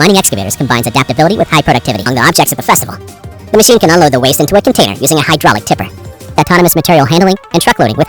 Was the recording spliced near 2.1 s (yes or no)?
yes